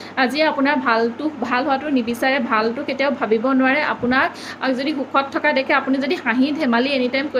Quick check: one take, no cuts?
yes; 0 cuts

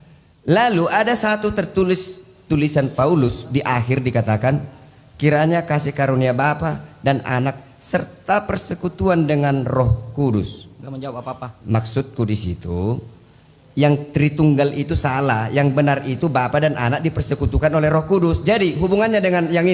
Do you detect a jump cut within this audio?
no; 0 cuts

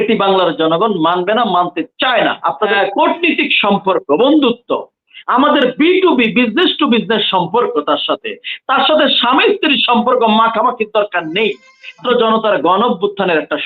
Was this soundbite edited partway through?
yes; 2 cuts; at 2.7 s, 12.0 s

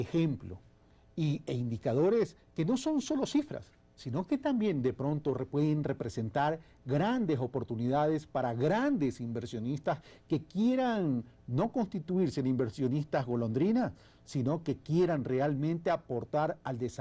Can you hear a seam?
no; 0 cuts

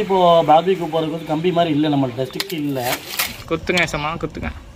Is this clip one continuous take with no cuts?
no; 1 cut; at 3.4 s

